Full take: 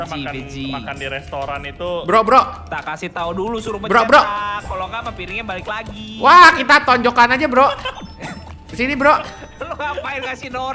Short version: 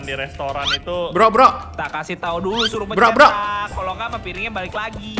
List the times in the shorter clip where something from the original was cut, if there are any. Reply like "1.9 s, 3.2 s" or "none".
none